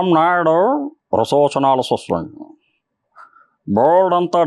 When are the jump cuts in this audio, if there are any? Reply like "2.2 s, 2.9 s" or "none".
none